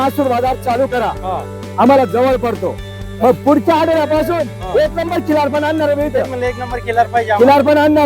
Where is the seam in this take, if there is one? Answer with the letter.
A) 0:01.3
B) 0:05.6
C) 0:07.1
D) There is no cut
D